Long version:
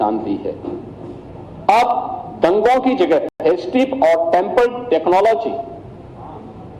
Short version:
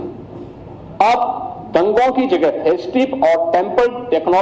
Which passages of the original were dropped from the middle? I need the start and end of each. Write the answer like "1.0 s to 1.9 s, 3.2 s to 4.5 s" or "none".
3.3 s to 3.4 s